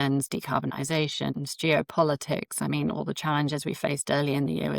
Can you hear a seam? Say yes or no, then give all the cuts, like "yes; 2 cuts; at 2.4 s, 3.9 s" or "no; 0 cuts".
no; 0 cuts